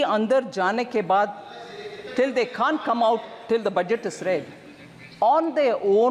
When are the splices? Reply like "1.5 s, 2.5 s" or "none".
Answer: none